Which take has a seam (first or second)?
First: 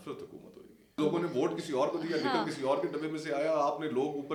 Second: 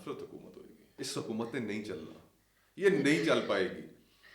second